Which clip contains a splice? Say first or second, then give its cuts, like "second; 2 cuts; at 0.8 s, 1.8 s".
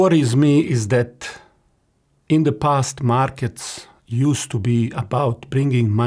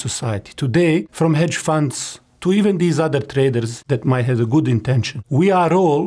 second; 3 cuts; at 1.1 s, 3.7 s, 5.1 s